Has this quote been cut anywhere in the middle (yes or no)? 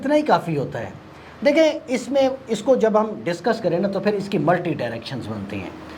no